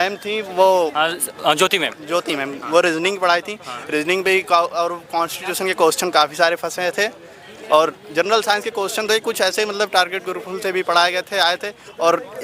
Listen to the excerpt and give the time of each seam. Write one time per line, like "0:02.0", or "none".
none